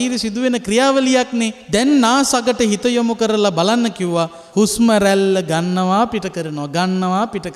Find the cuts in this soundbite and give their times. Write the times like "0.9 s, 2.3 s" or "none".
1.6 s, 4.4 s